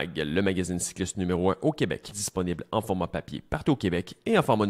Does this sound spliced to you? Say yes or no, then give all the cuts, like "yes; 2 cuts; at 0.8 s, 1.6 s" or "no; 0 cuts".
yes; 1 cut; at 2.1 s